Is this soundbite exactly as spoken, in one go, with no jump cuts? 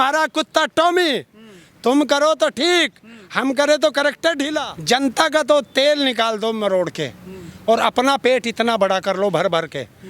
no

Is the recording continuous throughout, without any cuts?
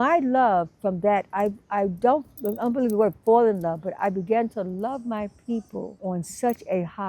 no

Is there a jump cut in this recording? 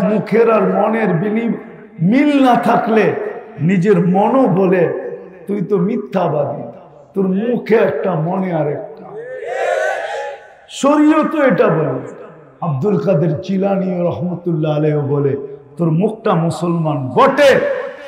no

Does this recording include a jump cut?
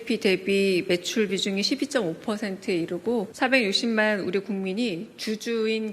yes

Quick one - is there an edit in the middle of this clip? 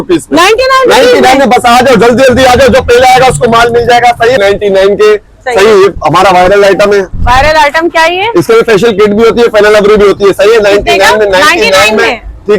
yes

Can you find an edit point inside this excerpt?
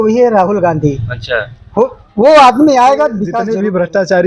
yes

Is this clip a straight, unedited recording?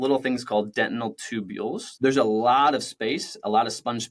no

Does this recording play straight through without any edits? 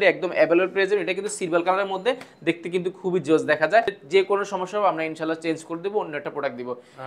no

